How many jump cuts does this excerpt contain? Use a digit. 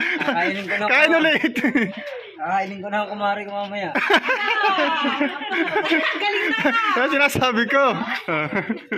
0